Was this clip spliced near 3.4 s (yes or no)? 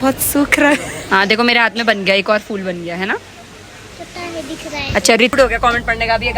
no